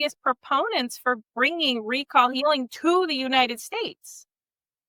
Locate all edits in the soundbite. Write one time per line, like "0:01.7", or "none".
none